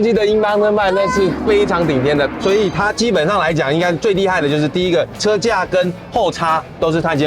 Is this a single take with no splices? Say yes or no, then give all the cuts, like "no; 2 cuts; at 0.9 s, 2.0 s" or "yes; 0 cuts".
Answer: yes; 0 cuts